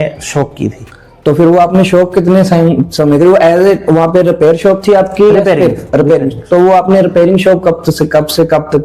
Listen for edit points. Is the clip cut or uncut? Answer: uncut